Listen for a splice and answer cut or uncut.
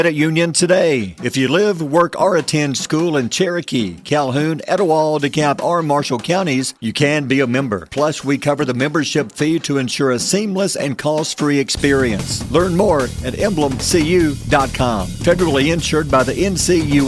uncut